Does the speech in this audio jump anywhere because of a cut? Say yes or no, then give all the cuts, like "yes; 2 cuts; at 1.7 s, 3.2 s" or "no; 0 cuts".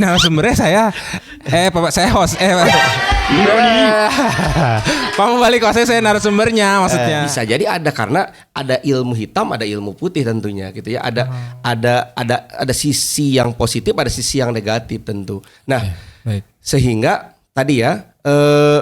yes; 1 cut; at 7.3 s